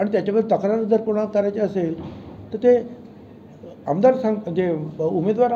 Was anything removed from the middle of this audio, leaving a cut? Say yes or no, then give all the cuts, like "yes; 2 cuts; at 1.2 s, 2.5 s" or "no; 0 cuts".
no; 0 cuts